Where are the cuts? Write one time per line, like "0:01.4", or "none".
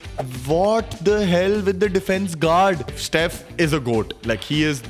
0:02.9